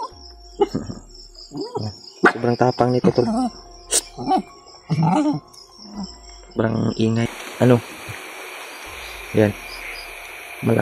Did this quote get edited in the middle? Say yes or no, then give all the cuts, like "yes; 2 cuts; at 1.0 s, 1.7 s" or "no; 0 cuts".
yes; 1 cut; at 7.4 s